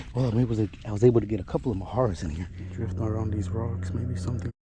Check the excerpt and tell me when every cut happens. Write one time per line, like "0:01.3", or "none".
0:02.6